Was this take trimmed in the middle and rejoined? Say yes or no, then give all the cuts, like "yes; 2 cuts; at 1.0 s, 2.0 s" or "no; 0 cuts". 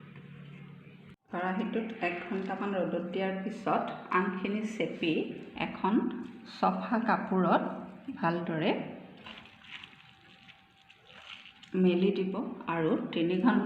yes; 1 cut; at 1.2 s